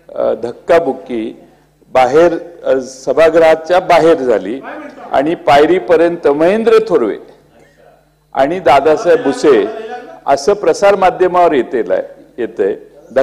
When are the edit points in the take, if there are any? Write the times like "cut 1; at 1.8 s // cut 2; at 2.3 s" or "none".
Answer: none